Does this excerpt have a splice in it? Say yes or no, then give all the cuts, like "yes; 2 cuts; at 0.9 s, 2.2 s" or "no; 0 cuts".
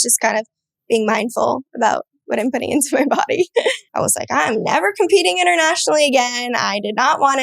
yes; 1 cut; at 3.8 s